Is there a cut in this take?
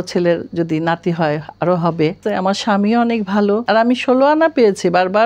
yes; 2 cuts; at 2.2 s, 3.6 s

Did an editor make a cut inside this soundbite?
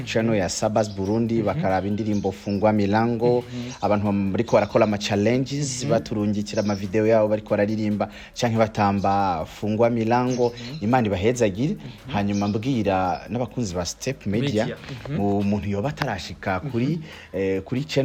no; 0 cuts

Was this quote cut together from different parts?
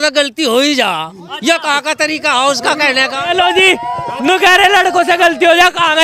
no; 0 cuts

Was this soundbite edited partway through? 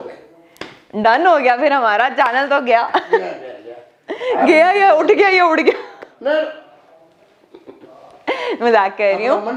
no; 0 cuts

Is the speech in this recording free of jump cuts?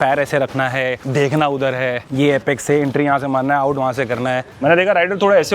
no; 2 cuts; at 1.0 s, 4.5 s

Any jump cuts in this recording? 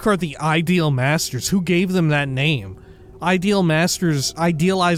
no; 0 cuts

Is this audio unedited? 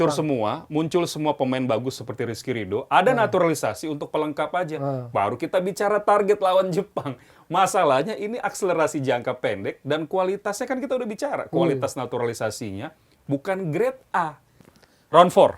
no; 1 cut; at 14.7 s

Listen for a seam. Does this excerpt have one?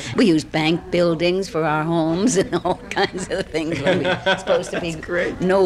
no; 0 cuts

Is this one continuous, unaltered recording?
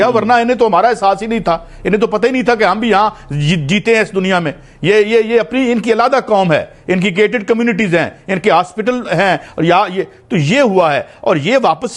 yes; 0 cuts

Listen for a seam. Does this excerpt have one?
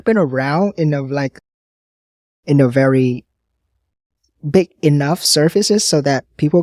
no; 0 cuts

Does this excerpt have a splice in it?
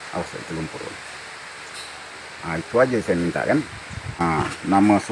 yes; 1 cut; at 4.2 s

